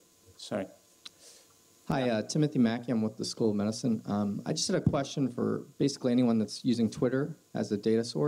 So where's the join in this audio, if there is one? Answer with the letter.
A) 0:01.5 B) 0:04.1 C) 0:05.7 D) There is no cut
B